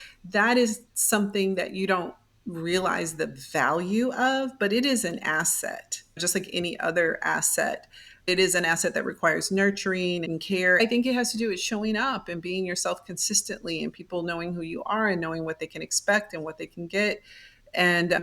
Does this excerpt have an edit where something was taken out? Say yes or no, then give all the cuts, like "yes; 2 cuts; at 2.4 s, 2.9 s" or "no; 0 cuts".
yes; 1 cut; at 10.8 s